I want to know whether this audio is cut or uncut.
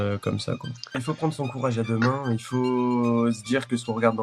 cut